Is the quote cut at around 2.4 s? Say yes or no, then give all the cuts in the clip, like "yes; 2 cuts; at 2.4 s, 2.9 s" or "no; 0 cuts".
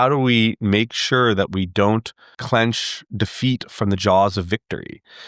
yes; 1 cut; at 2.4 s